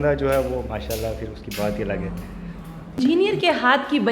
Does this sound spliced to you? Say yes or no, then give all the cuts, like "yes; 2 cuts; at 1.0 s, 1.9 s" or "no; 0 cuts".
yes; 1 cut; at 3.0 s